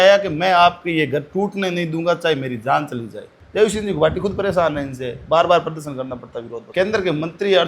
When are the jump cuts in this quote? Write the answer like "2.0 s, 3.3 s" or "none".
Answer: 3.4 s, 6.6 s